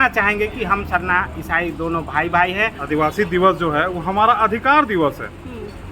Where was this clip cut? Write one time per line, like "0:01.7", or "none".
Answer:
0:02.8